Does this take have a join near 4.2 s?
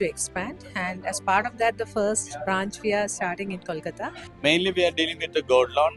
yes; 1 cut; at 4.2 s

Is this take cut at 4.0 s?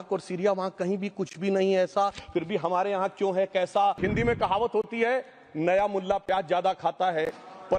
yes; 1 cut; at 4.0 s

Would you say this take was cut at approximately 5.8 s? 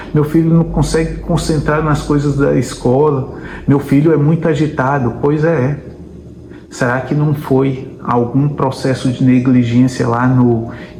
no; 0 cuts

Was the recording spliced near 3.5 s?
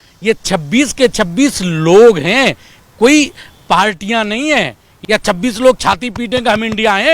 no; 1 cut; at 4.9 s

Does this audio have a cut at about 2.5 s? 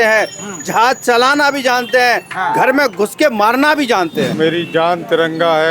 no; 1 cut; at 4.3 s

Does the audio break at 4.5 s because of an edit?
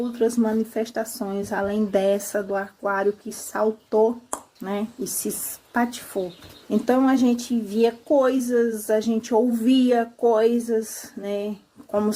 yes; 2 cuts; at 4.5 s, 6.5 s

